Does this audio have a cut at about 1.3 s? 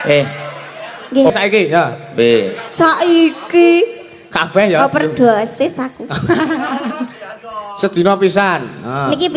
yes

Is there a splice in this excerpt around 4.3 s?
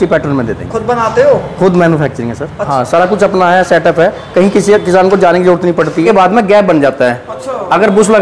no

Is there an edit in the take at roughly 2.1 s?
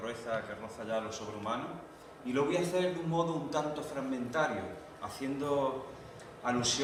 no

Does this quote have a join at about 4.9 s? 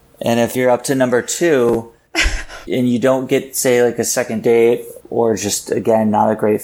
no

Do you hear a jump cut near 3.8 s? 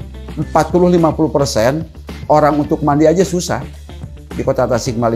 no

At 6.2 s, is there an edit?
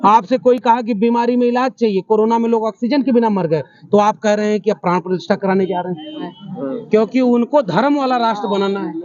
yes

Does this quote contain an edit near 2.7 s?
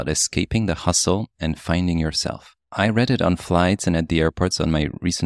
yes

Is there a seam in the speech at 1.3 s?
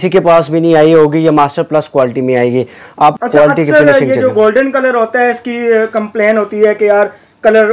no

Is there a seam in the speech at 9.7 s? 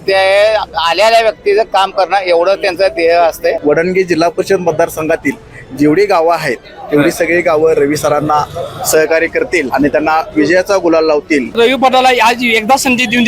yes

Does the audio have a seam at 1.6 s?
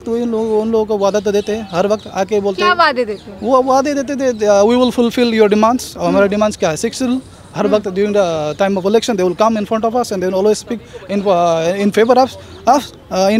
no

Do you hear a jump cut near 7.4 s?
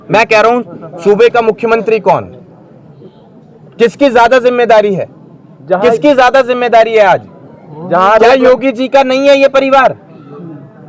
no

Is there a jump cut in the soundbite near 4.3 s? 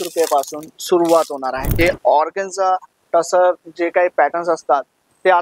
no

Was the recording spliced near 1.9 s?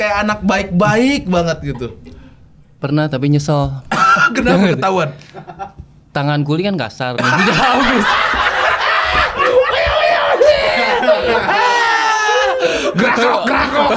no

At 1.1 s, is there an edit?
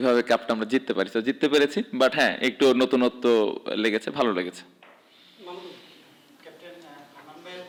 no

